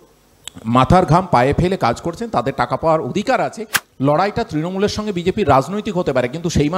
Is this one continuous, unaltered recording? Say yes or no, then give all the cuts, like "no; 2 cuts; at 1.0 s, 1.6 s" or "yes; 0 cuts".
no; 1 cut; at 3.7 s